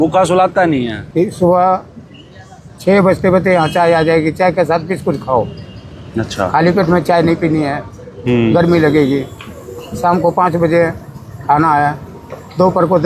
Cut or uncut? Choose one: cut